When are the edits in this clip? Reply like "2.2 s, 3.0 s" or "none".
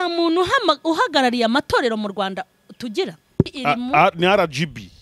3.5 s